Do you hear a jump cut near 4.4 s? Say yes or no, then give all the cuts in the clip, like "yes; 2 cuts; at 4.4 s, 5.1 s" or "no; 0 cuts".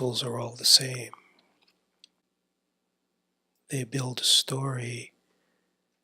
no; 1 cut; at 2.2 s